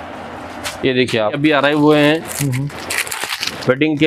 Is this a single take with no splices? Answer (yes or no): no